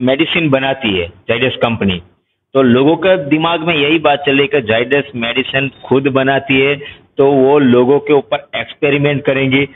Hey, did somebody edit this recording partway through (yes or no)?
no